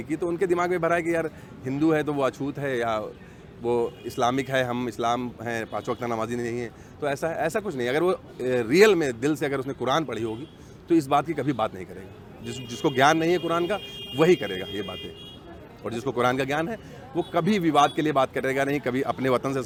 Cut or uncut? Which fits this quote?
uncut